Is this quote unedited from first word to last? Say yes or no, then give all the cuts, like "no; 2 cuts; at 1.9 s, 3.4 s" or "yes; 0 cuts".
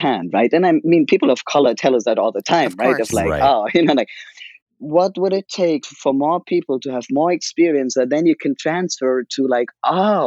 no; 2 cuts; at 4.6 s, 5.9 s